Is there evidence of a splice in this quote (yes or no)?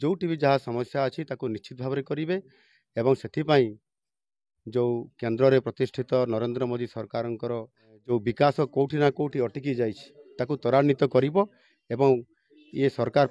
yes